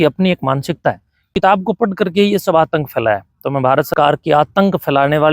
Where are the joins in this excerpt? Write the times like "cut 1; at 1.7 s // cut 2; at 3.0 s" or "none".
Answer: cut 1; at 1.2 s // cut 2; at 3.9 s